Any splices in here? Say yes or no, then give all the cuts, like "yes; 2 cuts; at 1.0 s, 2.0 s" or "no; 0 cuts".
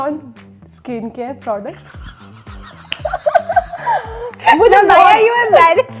no; 0 cuts